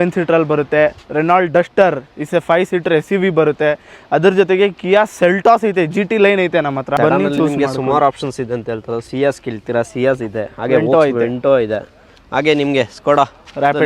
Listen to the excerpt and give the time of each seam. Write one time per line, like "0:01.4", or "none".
0:06.9